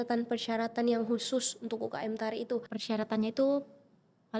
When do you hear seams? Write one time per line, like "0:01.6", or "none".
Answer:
0:02.7